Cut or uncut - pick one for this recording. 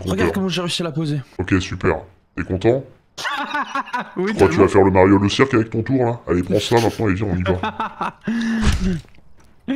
cut